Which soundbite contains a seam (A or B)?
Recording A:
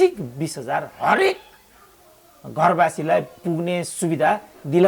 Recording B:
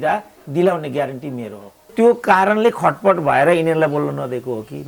B